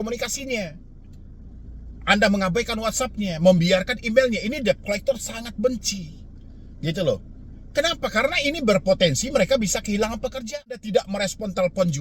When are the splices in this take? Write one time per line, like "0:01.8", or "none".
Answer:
0:10.8